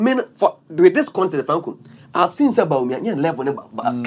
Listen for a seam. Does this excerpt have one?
no; 0 cuts

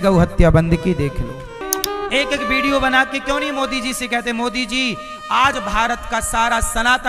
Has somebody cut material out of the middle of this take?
yes; 1 cut; at 1.6 s

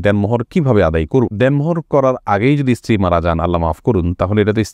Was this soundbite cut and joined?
no; 0 cuts

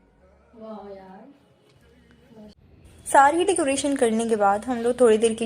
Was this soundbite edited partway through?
yes; 1 cut; at 2.6 s

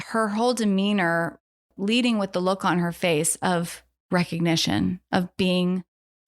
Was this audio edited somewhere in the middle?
yes; 1 cut; at 1.7 s

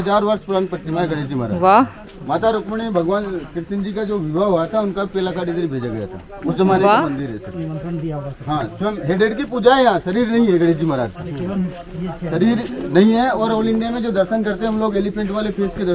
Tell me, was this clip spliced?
no; 0 cuts

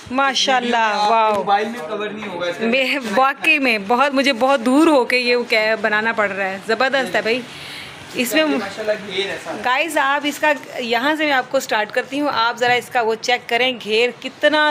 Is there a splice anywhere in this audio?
no; 0 cuts

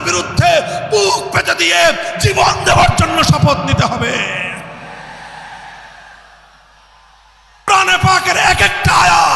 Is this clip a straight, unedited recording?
no; 1 cut; at 7.7 s

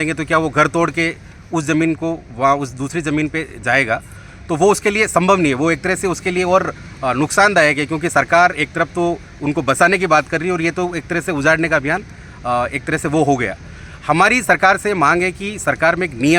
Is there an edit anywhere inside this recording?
no; 0 cuts

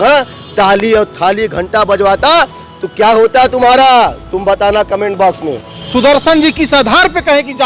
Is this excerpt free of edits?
no; 1 cut; at 5.7 s

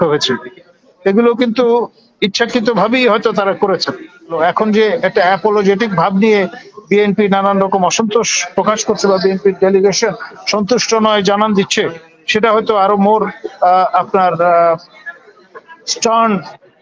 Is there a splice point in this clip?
yes; 1 cut; at 4.3 s

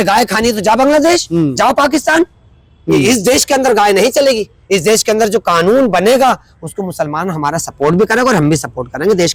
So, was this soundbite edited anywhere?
no; 0 cuts

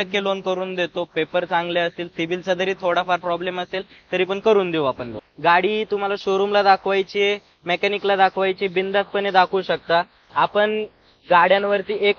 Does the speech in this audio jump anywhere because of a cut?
yes; 1 cut; at 5.2 s

